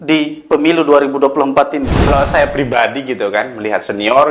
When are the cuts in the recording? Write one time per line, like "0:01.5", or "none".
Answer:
0:02.1